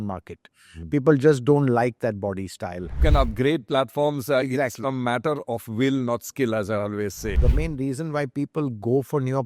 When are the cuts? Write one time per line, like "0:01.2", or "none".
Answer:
0:03.0
0:07.4